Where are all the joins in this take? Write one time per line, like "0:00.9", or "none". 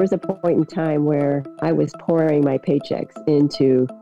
0:01.5